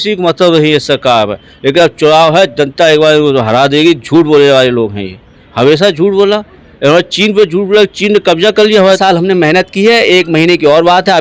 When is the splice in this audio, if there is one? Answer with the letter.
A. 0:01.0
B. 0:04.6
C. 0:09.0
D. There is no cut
C